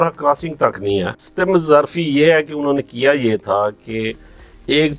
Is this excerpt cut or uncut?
cut